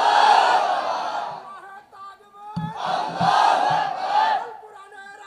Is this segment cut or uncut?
uncut